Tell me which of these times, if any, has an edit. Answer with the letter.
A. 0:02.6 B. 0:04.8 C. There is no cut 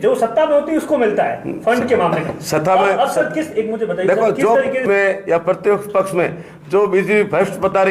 B